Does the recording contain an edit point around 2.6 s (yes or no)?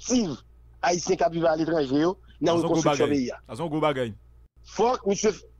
no